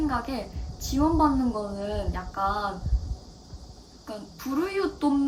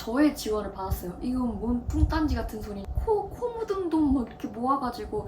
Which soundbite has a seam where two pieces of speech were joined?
second; 1 cut; at 2.9 s

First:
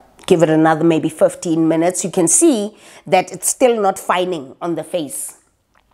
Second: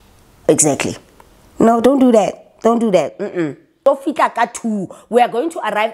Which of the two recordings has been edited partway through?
second; 1 cut; at 3.8 s

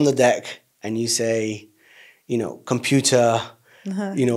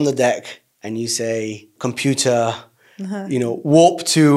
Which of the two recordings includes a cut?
second; 1 cut; at 1.7 s

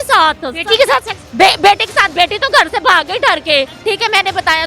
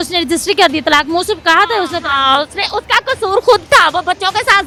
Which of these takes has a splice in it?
first; 2 cuts; at 1.2 s, 3.7 s

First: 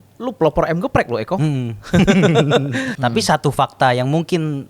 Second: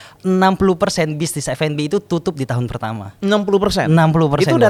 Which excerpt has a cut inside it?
first; 1 cut; at 2.9 s

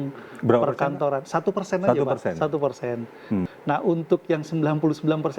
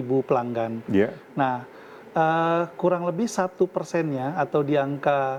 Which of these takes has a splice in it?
first; 1 cut; at 3.5 s

